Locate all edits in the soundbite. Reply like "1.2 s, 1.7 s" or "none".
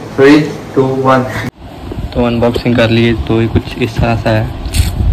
1.4 s

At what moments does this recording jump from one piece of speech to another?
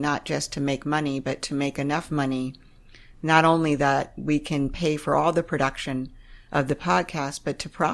none

